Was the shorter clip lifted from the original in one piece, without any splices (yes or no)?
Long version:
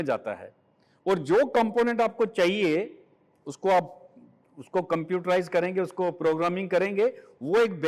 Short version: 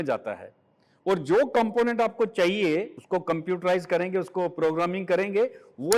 no